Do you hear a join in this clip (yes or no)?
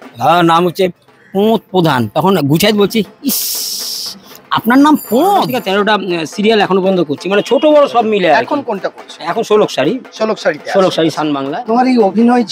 yes